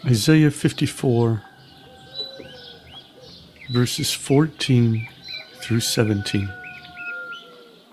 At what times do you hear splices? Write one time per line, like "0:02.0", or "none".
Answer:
0:01.6
0:03.3
0:06.9